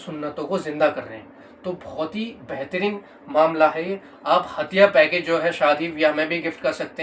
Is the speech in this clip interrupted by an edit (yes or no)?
no